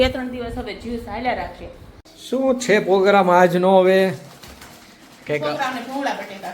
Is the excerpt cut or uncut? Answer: cut